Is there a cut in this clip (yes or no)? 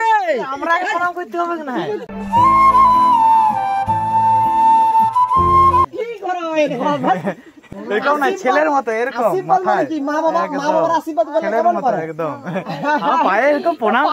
no